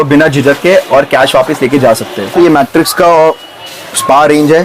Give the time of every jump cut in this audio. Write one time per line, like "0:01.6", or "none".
0:02.3